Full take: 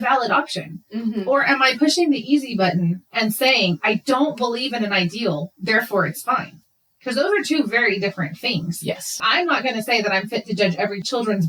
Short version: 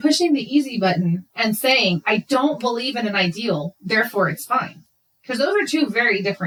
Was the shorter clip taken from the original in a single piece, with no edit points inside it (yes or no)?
yes